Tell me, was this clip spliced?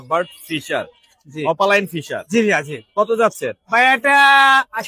no; 0 cuts

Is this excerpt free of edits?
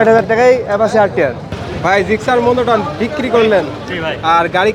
no; 1 cut; at 1.5 s

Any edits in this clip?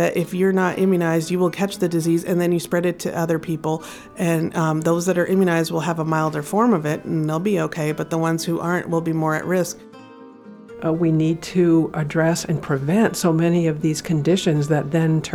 yes; 1 cut; at 10.3 s

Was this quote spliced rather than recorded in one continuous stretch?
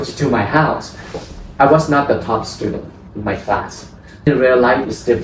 yes; 2 cuts; at 1.2 s, 4.3 s

